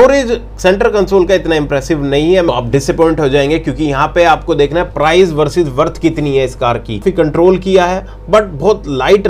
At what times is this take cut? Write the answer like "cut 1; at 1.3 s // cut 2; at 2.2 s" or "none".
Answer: cut 1; at 2.5 s // cut 2; at 7.0 s